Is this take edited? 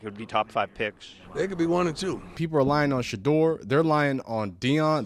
yes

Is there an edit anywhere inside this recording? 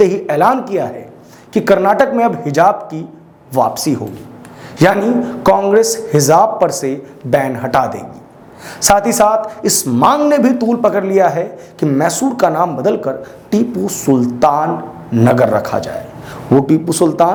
no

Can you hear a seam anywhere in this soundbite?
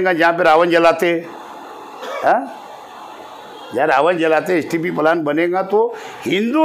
no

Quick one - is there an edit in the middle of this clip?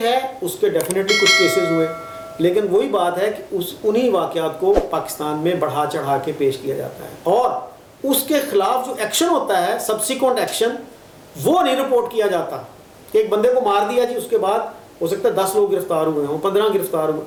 no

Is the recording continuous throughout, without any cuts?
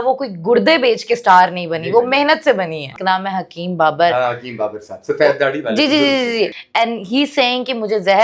no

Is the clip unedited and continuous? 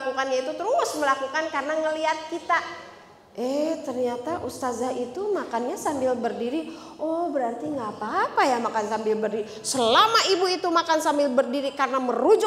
yes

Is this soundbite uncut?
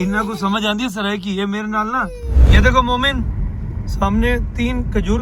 no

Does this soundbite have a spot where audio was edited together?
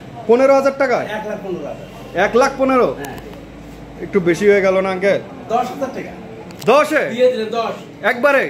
no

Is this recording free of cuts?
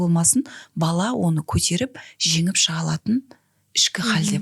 yes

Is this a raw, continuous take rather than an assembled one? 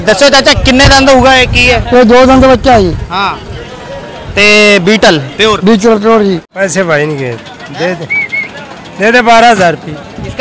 no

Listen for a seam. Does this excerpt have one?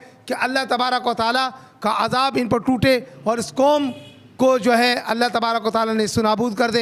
no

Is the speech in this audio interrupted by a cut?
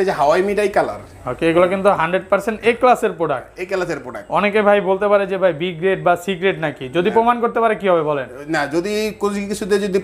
no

